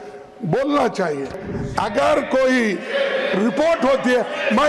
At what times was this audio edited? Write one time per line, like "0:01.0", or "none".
0:01.5